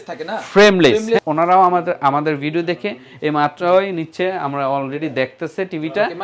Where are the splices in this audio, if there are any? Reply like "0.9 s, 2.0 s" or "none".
1.2 s